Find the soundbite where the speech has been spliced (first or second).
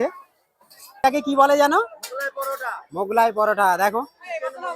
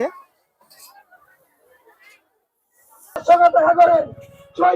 first